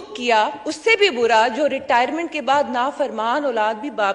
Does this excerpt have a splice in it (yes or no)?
no